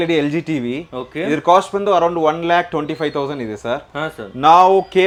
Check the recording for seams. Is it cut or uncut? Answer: uncut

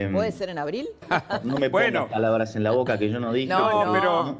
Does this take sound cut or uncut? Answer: cut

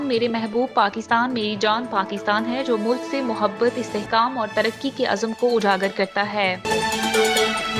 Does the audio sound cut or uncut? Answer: cut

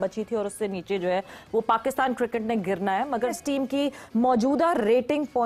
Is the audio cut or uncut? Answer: cut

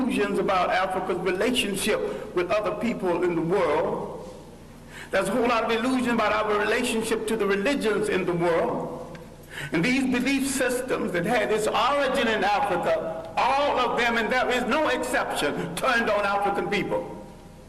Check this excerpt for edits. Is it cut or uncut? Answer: uncut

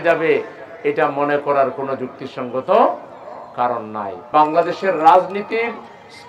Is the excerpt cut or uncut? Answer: cut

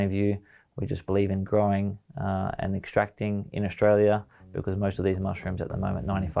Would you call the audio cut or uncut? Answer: uncut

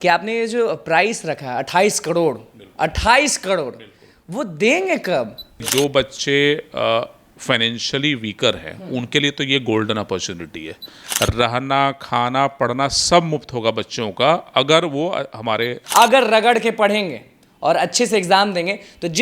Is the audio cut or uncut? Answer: cut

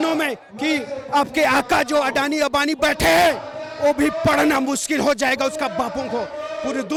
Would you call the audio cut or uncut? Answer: uncut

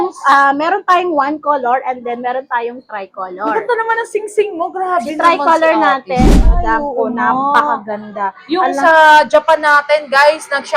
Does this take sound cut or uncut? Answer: cut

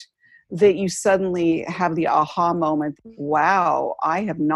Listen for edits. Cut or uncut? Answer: cut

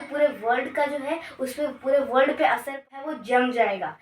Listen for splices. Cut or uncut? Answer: cut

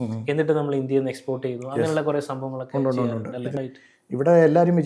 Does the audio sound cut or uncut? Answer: cut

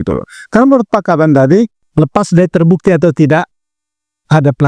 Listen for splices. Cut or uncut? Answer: cut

